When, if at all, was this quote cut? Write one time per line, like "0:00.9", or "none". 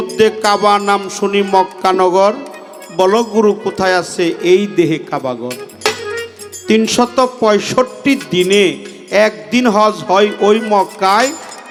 none